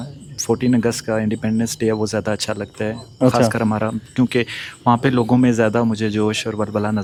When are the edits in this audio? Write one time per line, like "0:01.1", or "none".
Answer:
none